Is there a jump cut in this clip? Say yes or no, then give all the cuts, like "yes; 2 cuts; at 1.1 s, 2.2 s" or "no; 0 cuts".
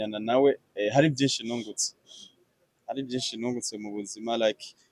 no; 0 cuts